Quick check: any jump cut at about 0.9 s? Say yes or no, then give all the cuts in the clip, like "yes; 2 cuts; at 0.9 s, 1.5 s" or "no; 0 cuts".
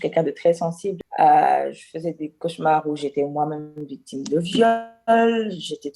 yes; 1 cut; at 0.9 s